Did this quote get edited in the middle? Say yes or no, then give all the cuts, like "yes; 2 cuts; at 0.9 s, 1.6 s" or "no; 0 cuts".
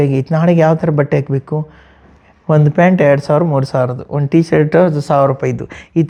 no; 0 cuts